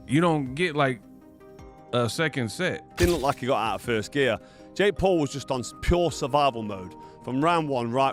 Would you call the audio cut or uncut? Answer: cut